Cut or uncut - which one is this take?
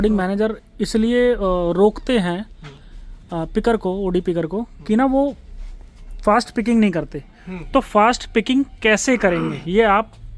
uncut